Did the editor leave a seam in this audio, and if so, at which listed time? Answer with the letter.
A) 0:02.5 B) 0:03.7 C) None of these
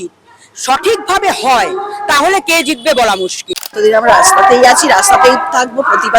B